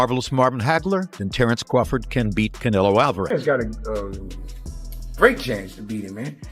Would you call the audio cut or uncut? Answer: cut